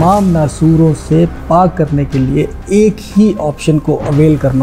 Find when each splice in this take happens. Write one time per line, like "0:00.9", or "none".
none